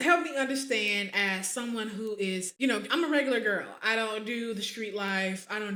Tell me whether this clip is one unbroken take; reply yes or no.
yes